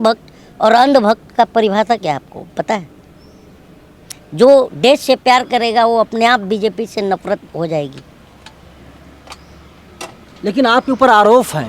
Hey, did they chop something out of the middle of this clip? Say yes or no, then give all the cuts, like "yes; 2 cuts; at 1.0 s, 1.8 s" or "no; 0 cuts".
no; 0 cuts